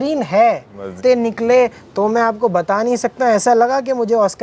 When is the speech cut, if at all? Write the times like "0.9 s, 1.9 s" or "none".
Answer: 1.0 s